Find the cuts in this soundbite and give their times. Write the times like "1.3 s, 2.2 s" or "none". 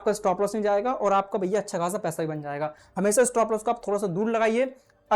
none

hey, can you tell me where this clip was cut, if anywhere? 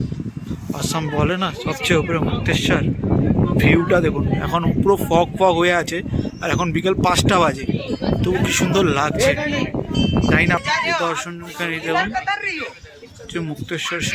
10.6 s

